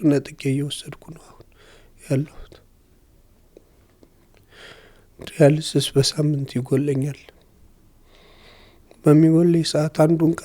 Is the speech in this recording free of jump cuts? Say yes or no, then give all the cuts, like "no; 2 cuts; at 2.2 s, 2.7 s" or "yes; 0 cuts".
yes; 0 cuts